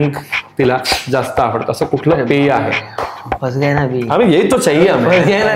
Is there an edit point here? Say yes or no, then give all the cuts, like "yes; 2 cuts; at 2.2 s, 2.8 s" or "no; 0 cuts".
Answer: no; 0 cuts